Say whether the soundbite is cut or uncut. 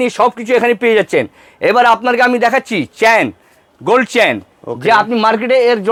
uncut